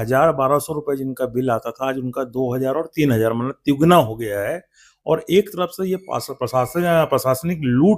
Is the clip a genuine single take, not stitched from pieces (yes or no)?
yes